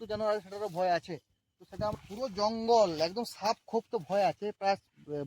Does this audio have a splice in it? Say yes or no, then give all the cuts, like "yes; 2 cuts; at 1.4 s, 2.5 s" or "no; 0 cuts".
yes; 1 cut; at 1.9 s